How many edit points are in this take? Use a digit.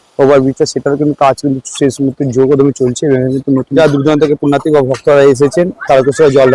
1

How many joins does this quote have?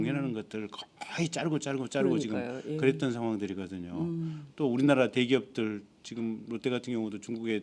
1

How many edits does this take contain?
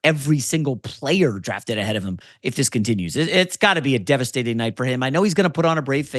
0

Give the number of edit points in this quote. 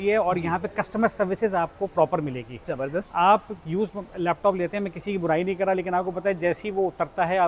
0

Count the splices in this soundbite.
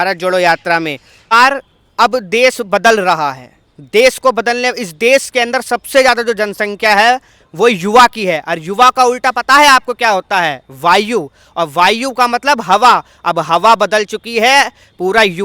1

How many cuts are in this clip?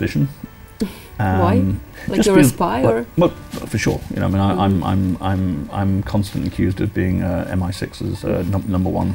0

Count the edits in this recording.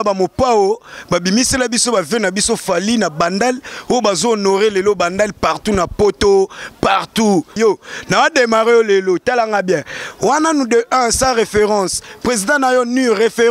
1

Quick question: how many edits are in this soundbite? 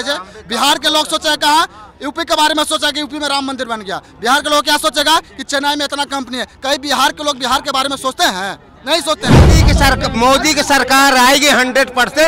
1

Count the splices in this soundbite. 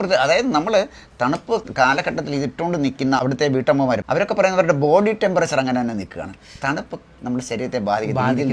2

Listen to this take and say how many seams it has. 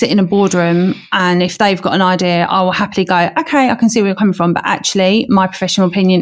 0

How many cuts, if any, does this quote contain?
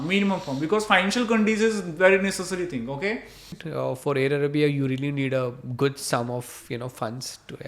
1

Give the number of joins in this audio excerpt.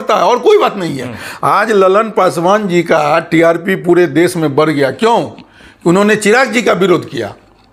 0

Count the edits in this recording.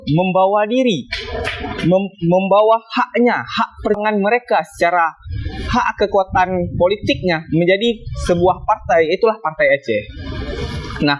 1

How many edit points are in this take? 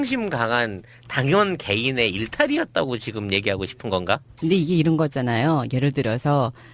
1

